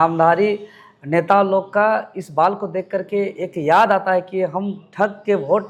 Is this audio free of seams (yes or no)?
yes